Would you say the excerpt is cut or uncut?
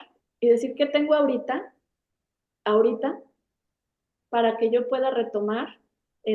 uncut